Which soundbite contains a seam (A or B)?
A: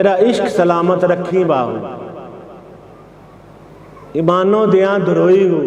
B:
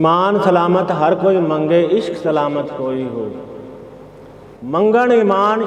B